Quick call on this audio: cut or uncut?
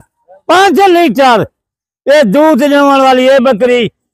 uncut